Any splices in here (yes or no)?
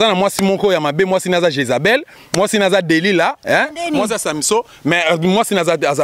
no